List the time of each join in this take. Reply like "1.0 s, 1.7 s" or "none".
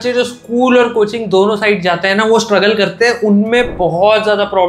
none